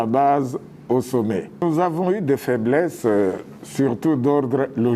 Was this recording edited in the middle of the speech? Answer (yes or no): yes